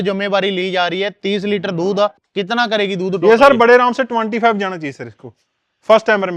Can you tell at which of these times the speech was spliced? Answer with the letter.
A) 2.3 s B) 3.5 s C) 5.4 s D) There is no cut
A